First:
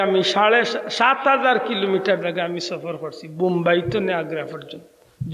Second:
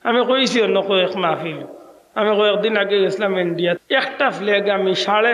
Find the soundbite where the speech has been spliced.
second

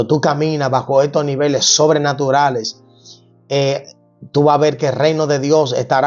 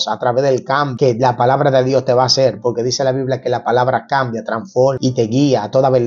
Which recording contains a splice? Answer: second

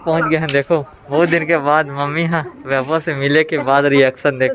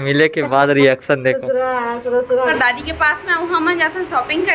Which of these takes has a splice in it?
second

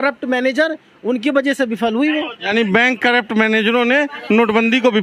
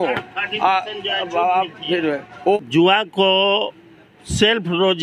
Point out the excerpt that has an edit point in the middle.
second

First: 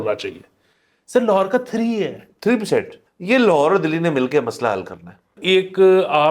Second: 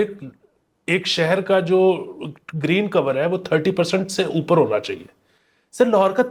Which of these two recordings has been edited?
first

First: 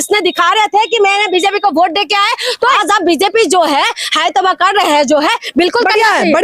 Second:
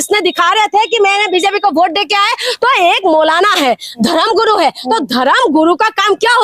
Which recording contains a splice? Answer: first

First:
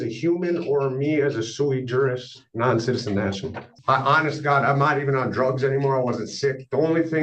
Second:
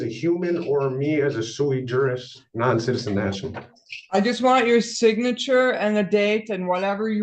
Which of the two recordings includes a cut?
first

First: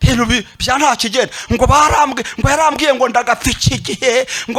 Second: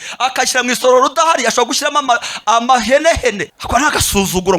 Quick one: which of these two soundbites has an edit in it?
second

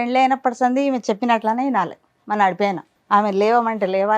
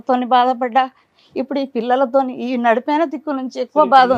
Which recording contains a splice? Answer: first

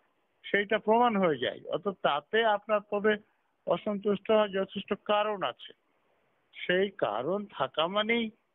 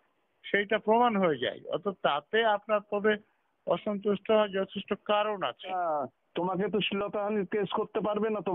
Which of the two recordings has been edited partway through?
second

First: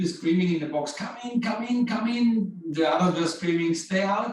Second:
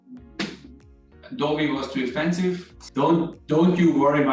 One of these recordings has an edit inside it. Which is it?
second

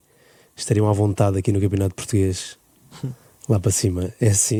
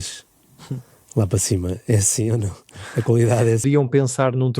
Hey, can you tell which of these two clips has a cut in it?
second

